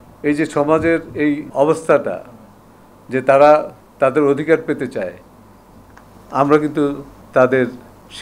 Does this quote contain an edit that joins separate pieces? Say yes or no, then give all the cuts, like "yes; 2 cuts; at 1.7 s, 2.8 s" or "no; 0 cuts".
yes; 1 cut; at 1.5 s